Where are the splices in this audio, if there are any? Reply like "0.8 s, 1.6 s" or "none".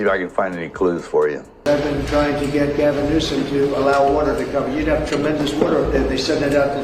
1.5 s

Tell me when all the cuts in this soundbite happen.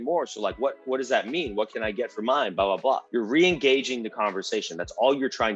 3.0 s

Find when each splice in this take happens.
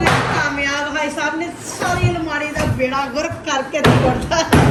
none

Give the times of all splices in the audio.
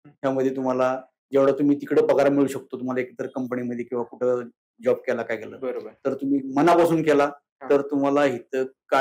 none

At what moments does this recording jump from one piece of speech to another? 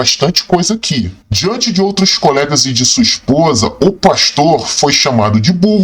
1.2 s

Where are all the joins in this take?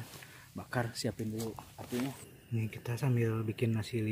2.3 s

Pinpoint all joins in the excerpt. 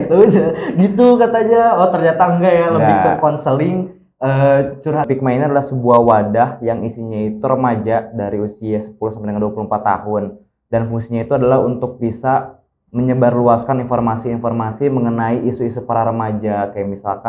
5.1 s

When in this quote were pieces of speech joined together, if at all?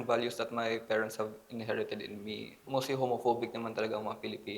2.7 s

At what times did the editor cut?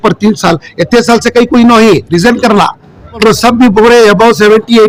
none

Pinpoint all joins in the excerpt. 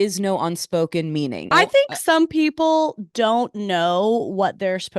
1.5 s

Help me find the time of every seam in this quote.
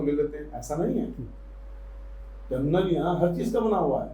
none

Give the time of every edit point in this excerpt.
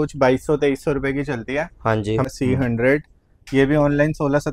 2.3 s

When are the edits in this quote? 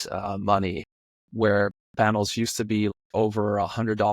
1.2 s, 2.9 s

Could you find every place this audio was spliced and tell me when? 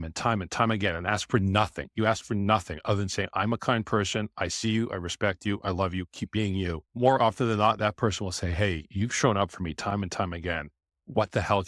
6.9 s

